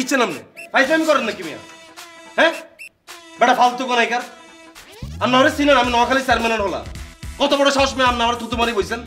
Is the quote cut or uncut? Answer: uncut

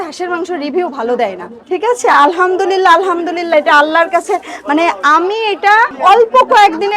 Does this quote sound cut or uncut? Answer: cut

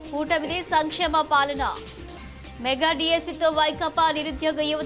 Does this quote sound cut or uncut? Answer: uncut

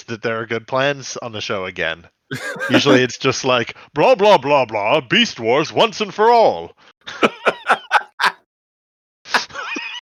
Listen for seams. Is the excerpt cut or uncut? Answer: uncut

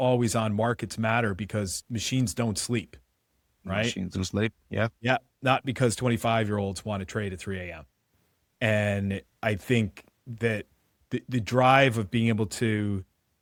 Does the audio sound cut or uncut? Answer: uncut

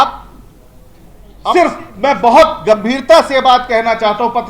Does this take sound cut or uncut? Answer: cut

